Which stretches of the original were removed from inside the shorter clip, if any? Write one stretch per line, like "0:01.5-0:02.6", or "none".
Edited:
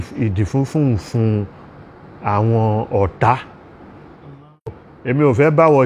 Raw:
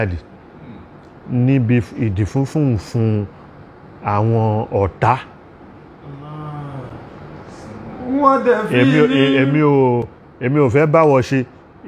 0:06.7-0:10.2